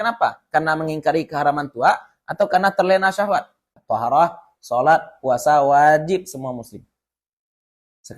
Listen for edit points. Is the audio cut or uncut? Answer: cut